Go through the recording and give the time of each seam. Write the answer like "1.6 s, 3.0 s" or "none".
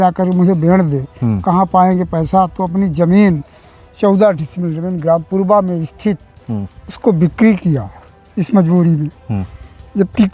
none